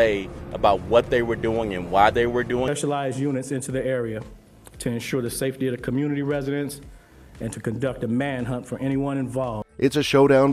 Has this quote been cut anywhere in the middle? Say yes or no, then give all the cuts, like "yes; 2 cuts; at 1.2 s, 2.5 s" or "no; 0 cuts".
no; 0 cuts